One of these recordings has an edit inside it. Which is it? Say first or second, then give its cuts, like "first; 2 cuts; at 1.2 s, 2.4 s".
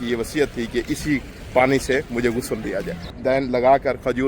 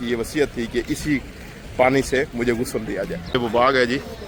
first; 2 cuts; at 1.4 s, 3.0 s